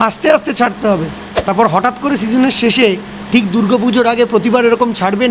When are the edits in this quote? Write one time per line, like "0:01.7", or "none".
0:01.3